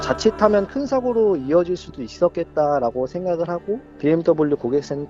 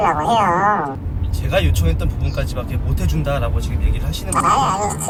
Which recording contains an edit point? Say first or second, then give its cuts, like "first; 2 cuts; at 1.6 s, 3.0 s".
first; 1 cut; at 3.9 s